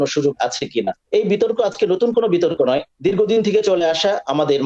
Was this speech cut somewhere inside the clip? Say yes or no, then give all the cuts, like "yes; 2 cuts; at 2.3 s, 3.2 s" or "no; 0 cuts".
yes; 2 cuts; at 1.0 s, 2.9 s